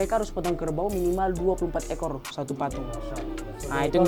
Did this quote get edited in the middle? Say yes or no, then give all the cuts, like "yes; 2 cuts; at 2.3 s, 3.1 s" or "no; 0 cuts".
no; 0 cuts